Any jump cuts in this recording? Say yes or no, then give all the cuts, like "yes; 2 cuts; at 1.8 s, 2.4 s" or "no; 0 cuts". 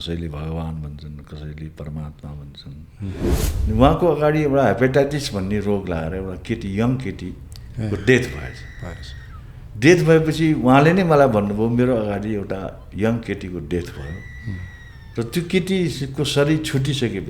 yes; 1 cut; at 3.3 s